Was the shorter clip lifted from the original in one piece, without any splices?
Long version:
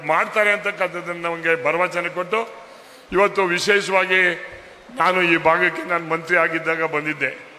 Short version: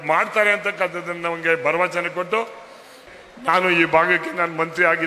no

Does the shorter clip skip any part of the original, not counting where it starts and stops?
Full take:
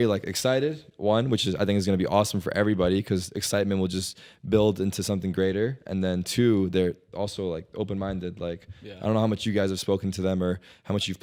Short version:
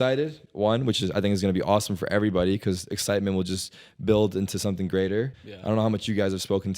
yes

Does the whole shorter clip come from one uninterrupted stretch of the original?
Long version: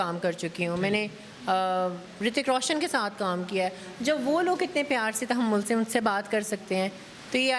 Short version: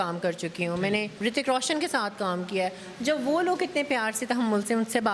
no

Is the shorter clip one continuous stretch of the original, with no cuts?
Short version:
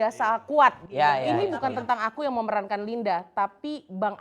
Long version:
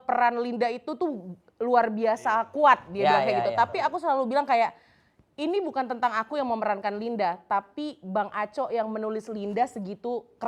no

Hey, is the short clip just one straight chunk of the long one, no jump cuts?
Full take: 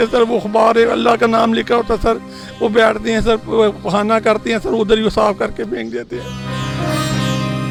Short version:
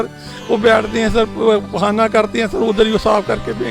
yes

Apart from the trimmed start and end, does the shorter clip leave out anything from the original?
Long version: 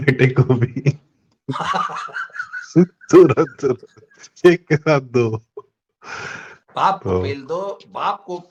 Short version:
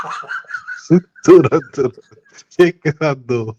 no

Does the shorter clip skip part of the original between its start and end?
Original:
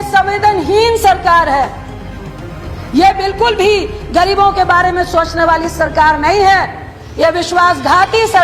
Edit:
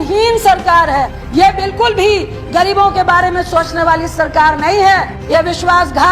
yes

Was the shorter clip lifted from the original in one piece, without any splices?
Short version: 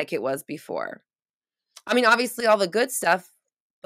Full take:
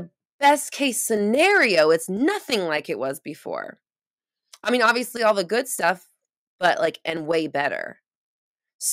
yes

